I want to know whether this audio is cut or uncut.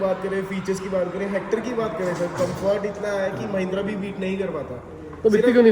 uncut